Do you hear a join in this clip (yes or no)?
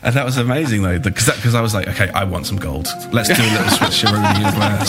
no